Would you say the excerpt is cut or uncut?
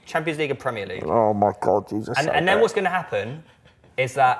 uncut